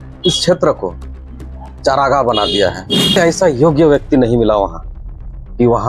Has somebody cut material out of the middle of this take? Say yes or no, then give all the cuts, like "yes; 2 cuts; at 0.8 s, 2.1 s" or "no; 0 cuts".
yes; 1 cut; at 3.2 s